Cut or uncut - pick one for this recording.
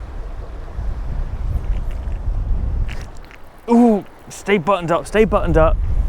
uncut